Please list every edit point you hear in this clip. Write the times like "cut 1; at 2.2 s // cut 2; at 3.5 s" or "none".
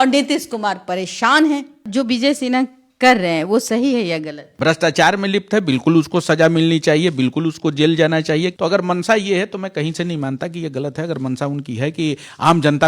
cut 1; at 1.8 s // cut 2; at 4.4 s // cut 3; at 8.5 s